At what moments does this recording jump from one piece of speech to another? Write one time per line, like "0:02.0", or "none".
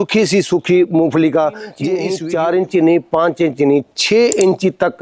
0:02.1